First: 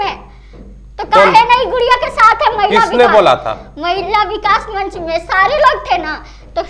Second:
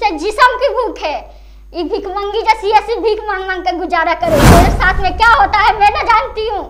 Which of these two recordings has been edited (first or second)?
second